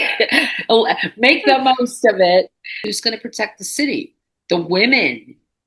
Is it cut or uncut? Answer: cut